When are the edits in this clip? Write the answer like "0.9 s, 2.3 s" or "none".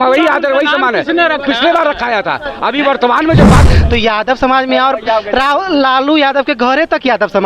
3.7 s